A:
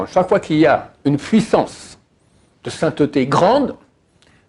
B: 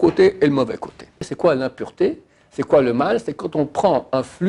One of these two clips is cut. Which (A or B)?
B